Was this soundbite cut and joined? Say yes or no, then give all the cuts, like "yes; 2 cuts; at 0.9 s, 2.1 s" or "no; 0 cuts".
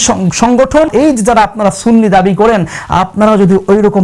yes; 1 cut; at 0.9 s